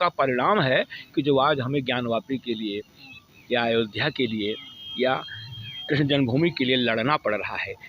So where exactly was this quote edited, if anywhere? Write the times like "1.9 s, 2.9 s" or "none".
none